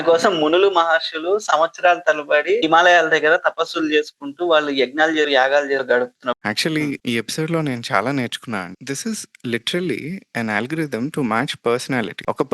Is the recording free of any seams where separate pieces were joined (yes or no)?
no